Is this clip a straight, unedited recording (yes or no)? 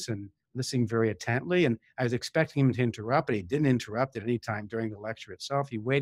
yes